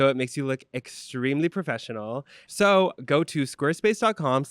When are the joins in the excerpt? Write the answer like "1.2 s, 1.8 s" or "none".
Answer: 2.4 s